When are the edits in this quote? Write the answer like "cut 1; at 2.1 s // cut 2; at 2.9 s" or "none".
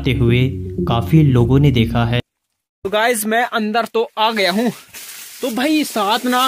cut 1; at 2.2 s